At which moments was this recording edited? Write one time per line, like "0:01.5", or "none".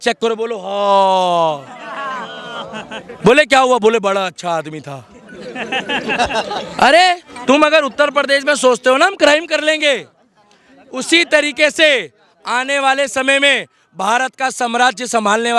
none